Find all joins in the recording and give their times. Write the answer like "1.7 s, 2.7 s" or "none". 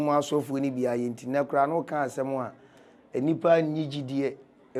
none